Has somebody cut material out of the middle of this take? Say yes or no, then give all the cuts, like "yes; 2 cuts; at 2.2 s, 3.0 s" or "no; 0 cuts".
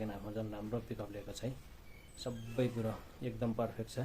yes; 1 cut; at 2.7 s